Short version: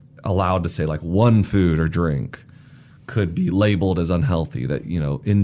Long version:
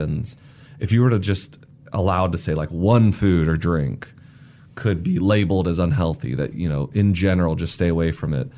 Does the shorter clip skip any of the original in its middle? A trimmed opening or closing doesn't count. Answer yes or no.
no